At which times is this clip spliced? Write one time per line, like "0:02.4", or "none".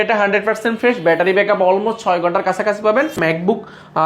0:03.1